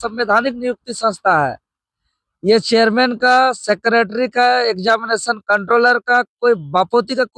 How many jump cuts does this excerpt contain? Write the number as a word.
zero